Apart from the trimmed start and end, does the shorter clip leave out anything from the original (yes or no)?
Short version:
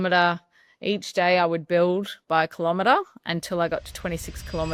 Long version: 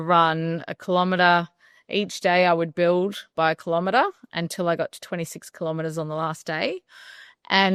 no